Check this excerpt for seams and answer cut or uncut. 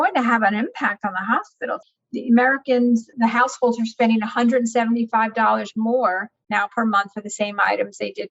cut